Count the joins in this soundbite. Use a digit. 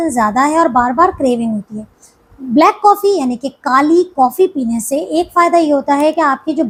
0